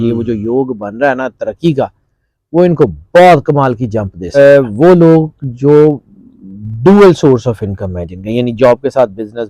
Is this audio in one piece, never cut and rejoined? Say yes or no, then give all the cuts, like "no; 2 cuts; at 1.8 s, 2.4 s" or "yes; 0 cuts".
no; 1 cut; at 4.4 s